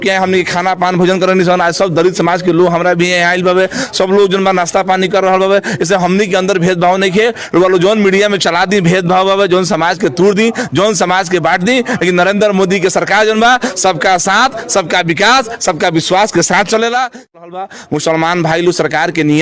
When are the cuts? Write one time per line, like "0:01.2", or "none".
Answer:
0:17.3